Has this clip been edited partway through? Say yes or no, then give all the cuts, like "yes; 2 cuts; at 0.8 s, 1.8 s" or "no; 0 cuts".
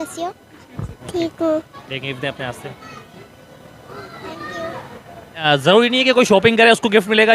yes; 1 cut; at 5.4 s